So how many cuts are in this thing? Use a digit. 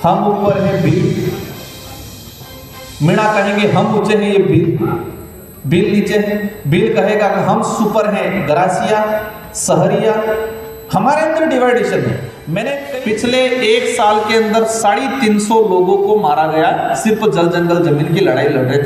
1